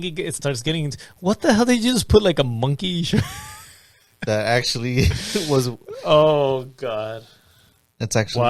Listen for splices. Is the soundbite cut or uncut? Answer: uncut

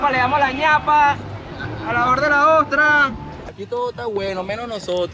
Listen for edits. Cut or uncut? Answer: cut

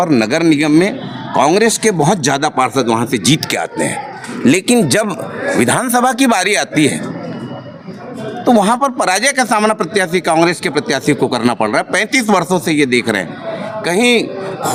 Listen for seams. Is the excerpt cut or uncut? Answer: uncut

